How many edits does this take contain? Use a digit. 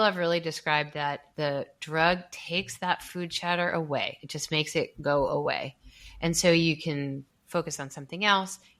1